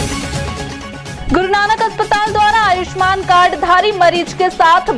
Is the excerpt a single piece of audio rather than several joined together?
yes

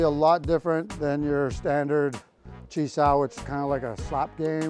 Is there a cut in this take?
no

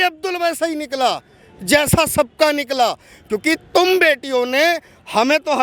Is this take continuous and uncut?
yes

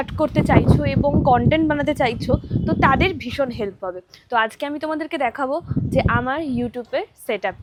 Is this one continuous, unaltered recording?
yes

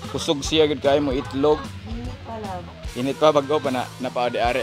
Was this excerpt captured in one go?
yes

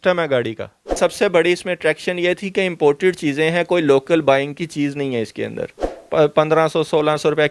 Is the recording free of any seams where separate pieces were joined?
no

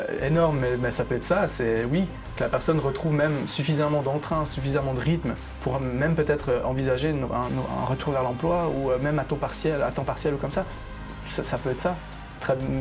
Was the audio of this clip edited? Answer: no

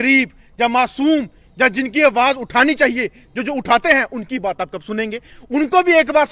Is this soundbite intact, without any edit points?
yes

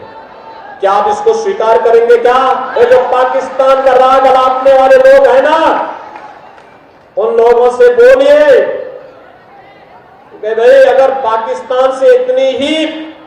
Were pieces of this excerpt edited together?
yes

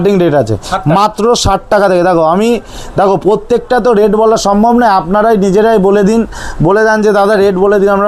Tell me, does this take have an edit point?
no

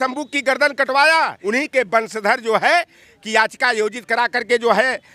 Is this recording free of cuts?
no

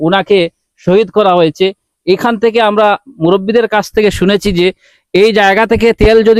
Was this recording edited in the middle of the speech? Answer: no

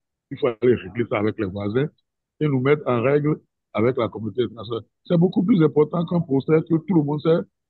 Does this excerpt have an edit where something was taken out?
no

